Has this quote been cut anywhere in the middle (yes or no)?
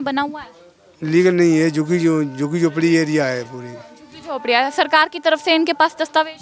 no